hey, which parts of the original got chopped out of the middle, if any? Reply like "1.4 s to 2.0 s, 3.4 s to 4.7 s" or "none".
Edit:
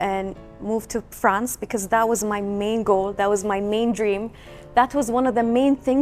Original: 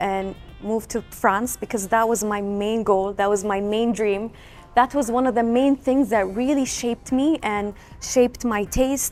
none